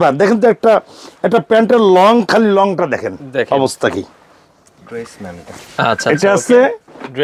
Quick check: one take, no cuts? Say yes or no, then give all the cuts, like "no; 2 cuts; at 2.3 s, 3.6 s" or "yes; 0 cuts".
yes; 0 cuts